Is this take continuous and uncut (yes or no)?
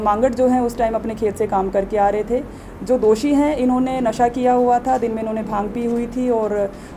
yes